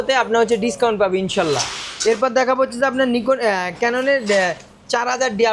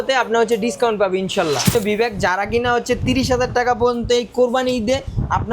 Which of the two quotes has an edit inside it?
second; 1 cut; at 1.7 s

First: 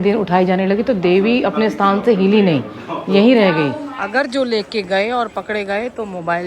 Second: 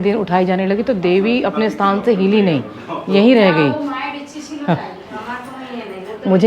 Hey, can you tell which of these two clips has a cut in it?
first; 1 cut; at 3.9 s

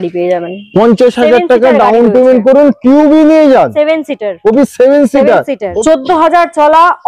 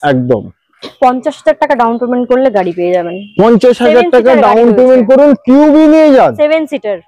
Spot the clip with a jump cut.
first; 1 cut; at 5.7 s

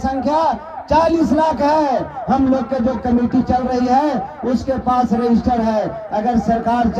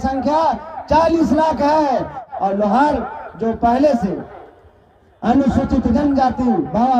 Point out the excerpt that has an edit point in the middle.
second; 1 cut; at 2.2 s

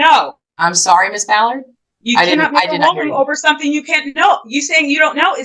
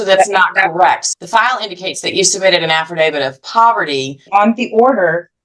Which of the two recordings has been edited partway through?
second; 2 cuts; at 1.1 s, 4.3 s

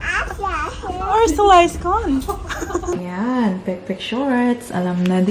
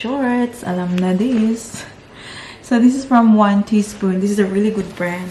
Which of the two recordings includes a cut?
first; 1 cut; at 2.9 s

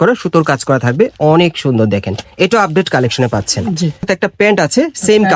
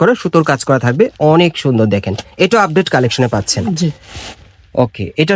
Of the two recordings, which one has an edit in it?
first; 1 cut; at 4.1 s

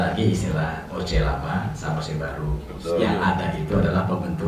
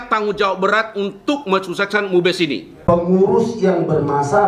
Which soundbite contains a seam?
second; 1 cut; at 2.7 s

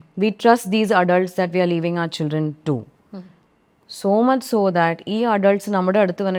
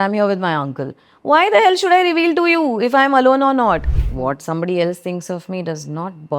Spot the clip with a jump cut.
second; 1 cut; at 4.1 s

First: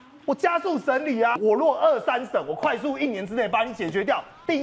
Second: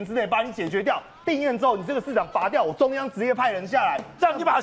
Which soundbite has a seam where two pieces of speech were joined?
first; 1 cut; at 1.4 s

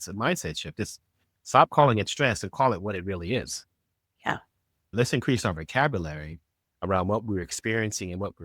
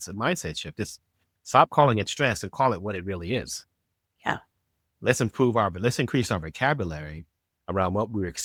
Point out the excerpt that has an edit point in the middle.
first; 1 cut; at 4.9 s

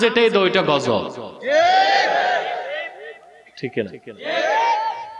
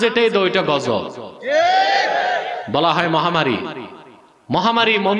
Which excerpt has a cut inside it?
second; 1 cut; at 2.6 s

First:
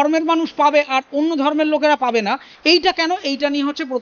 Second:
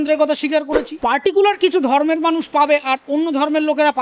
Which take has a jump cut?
second; 1 cut; at 0.9 s

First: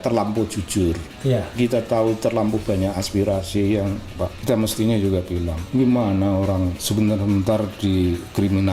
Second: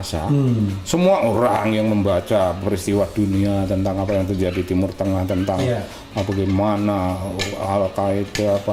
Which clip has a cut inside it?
first; 3 cuts; at 4.3 s, 5.6 s, 6.8 s

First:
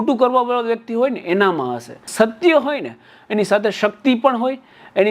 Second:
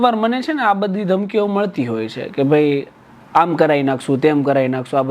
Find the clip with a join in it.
first; 1 cut; at 2.1 s

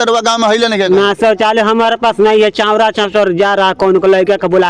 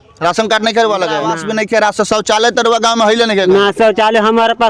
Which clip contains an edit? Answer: second; 1 cut; at 1.3 s

